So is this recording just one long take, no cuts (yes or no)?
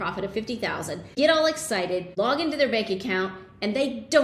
no